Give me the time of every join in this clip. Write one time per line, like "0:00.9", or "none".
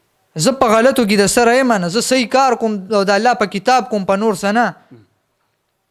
none